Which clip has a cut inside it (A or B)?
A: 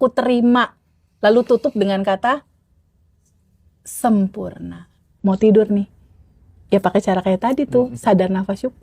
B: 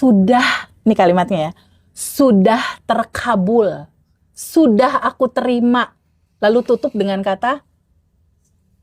A